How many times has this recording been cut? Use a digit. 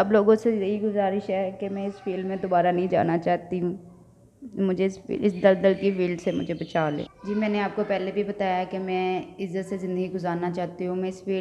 1